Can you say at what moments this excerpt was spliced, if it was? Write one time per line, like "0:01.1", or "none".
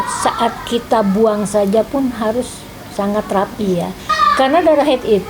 0:04.1